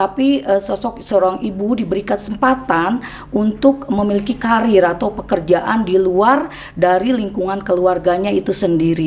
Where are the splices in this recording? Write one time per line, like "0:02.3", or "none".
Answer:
none